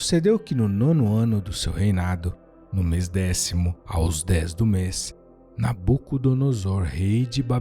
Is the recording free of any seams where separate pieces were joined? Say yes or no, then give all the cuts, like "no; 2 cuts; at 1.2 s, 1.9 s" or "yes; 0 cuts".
no; 1 cut; at 3.8 s